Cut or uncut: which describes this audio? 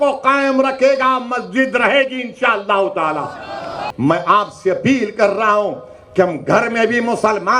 cut